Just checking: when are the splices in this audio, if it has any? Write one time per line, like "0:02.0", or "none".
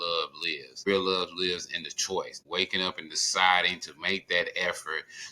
0:00.9
0:02.4